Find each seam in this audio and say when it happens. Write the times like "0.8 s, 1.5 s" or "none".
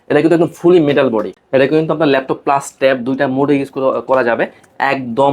1.3 s